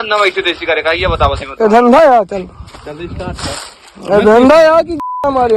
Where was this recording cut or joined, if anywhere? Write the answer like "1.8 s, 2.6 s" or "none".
none